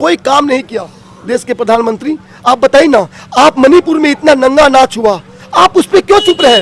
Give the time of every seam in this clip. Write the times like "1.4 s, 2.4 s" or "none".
none